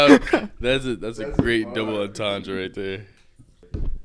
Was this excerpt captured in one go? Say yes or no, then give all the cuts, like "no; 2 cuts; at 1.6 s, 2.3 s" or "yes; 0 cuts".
yes; 0 cuts